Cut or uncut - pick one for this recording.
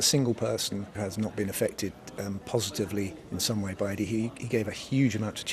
cut